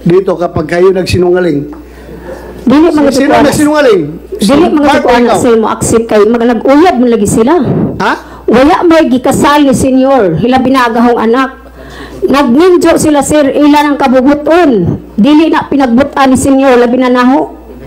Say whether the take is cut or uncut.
uncut